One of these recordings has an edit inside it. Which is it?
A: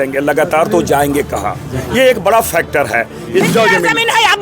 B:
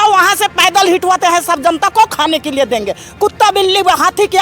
A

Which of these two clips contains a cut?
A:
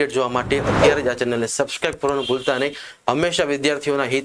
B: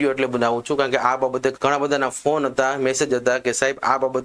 B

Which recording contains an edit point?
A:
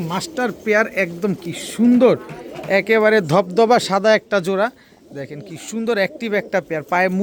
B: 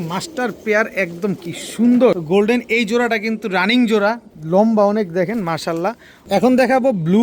B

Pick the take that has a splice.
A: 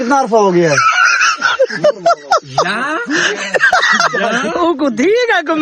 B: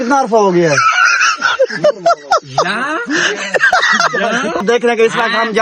B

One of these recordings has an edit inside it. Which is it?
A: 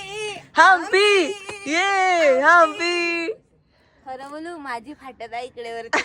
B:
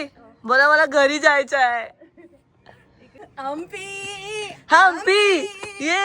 B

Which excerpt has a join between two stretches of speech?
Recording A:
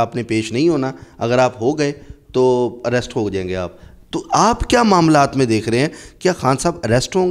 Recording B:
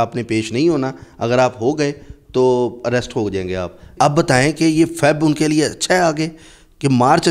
B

